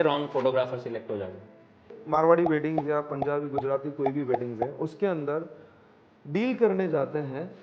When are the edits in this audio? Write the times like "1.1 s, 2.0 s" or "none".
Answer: 1.9 s